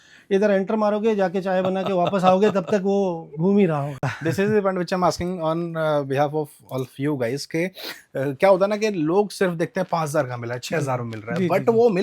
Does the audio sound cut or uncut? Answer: uncut